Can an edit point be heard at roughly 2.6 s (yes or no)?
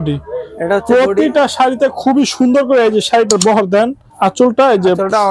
no